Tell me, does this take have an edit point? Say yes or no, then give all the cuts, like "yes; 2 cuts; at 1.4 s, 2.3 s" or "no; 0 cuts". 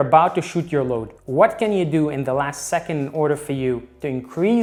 no; 0 cuts